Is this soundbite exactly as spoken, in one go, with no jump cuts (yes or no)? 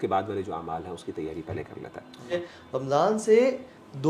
no